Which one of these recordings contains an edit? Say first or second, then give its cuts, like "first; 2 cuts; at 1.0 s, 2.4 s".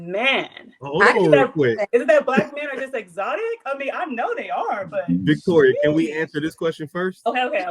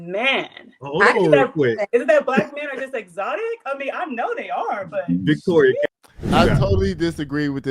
second; 1 cut; at 5.9 s